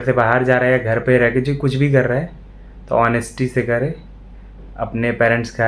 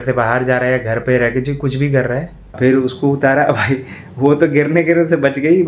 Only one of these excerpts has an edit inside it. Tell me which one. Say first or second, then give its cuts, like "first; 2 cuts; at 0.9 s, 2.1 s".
second; 1 cut; at 2.4 s